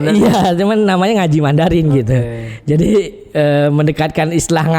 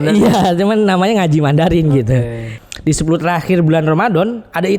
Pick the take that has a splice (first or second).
second